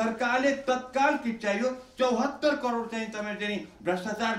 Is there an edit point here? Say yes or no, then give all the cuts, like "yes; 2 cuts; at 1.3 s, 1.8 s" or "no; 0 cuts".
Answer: no; 0 cuts